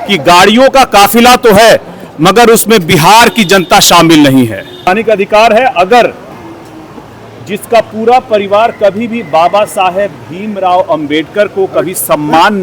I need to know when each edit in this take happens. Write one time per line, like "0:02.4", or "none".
0:04.9